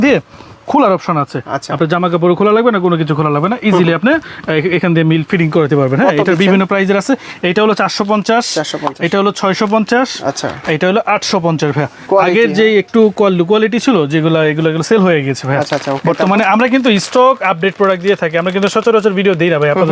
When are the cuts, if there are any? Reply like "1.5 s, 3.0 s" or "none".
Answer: none